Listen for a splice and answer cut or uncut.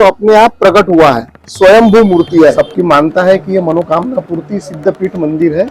cut